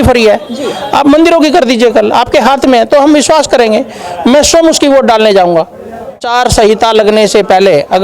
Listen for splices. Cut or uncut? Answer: cut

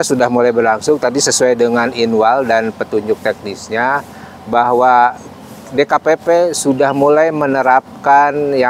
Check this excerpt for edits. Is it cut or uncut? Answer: uncut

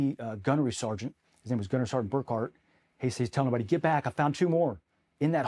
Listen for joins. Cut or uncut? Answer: uncut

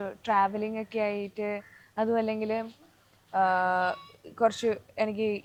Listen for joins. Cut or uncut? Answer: uncut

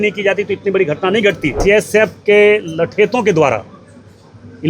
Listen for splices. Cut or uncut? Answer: cut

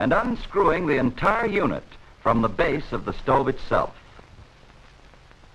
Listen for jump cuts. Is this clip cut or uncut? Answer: cut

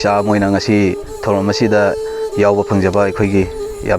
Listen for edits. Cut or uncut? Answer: uncut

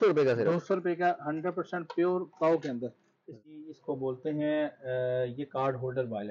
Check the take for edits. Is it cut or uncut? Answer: cut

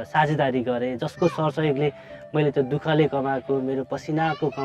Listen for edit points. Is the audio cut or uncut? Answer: uncut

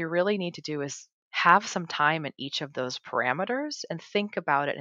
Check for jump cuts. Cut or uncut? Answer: uncut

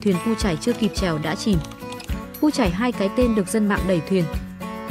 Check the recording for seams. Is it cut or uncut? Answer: uncut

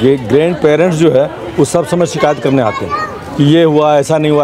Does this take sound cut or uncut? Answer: uncut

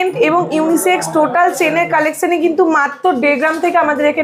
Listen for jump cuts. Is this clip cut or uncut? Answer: uncut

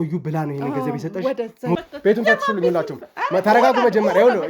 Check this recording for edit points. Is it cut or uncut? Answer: cut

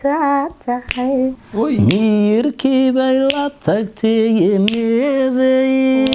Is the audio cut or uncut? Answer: cut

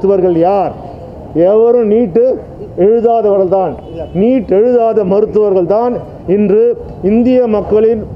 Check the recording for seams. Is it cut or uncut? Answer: uncut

